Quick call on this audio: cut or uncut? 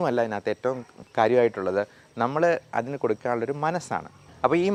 uncut